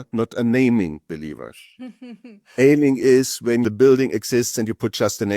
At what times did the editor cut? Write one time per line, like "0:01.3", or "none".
0:03.6